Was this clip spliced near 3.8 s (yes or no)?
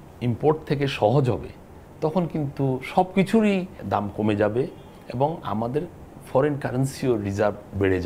yes